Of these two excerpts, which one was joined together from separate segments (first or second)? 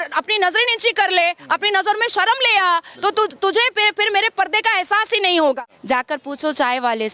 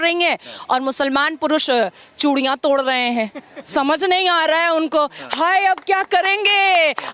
first